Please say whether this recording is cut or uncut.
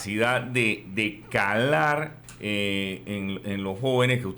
cut